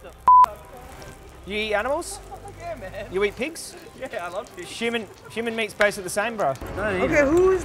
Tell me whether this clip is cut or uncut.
cut